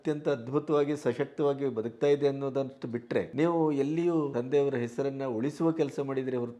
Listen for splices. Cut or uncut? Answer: cut